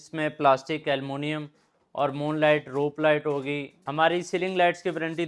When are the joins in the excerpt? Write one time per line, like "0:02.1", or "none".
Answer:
0:03.8